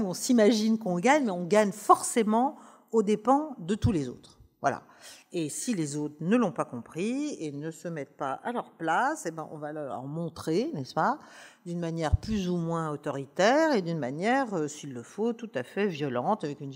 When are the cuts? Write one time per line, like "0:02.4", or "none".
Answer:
none